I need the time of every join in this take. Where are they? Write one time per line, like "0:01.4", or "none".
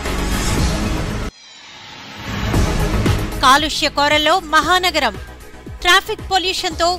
0:00.8
0:03.1